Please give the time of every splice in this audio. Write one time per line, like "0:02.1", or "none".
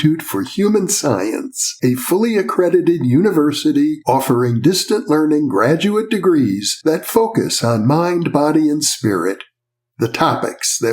none